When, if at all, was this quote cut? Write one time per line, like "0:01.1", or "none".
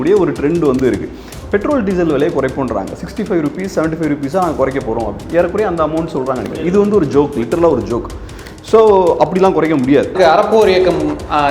0:01.3
0:10.1